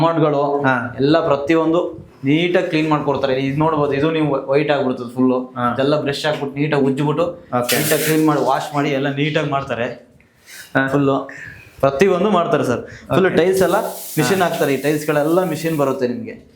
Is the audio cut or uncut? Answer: uncut